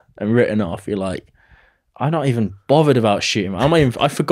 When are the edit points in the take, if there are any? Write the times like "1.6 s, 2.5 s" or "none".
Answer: none